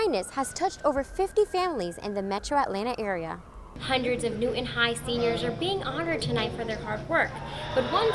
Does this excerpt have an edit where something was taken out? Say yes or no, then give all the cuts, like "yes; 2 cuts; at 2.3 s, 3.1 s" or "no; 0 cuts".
yes; 1 cut; at 3.8 s